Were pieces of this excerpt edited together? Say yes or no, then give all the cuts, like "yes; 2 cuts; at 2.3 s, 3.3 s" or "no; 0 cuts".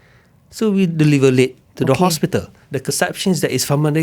yes; 1 cut; at 2.7 s